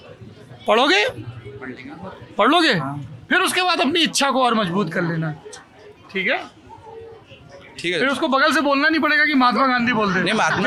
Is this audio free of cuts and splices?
yes; 0 cuts

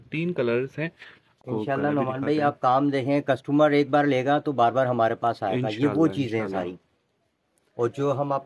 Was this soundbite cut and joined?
yes; 1 cut; at 1.4 s

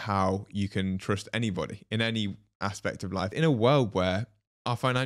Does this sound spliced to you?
yes; 1 cut; at 3.3 s

